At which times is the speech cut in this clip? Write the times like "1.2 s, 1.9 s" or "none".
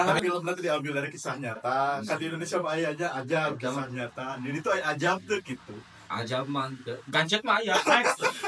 none